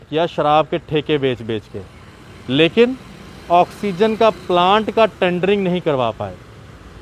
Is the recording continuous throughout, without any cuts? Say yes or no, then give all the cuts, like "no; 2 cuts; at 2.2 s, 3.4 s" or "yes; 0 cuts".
yes; 0 cuts